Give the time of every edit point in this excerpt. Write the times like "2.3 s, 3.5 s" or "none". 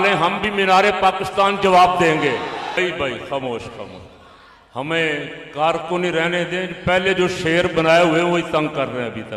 2.8 s